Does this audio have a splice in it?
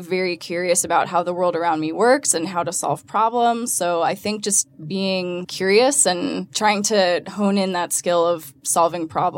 yes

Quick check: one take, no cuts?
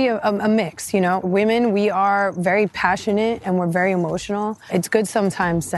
no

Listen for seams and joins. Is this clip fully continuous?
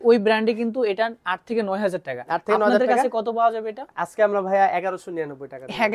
yes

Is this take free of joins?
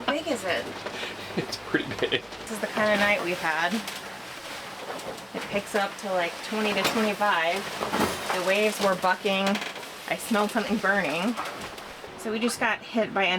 no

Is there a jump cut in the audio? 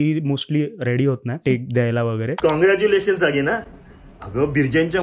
yes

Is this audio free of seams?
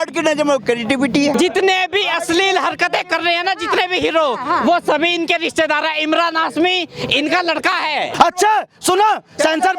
no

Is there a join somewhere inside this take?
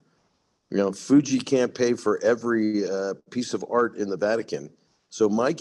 no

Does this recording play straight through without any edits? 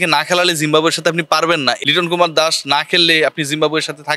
no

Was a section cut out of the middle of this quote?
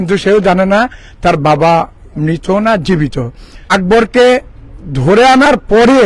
yes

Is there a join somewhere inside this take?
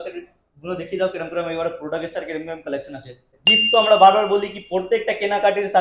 yes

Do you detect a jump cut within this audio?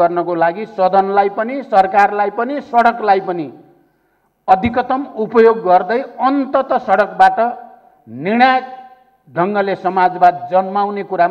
no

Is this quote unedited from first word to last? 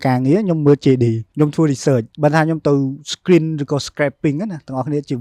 no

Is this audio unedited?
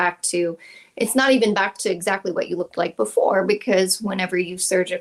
yes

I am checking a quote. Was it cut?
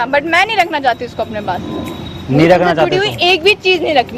no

